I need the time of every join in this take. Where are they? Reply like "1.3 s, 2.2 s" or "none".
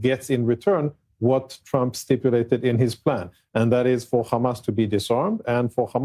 none